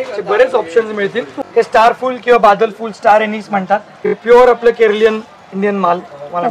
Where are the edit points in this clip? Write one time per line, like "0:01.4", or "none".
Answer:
0:01.3
0:04.0